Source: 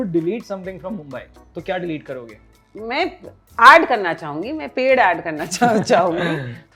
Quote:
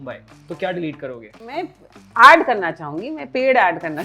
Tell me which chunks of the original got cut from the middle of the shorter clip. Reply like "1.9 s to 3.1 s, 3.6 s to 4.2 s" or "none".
2.6 s to 2.9 s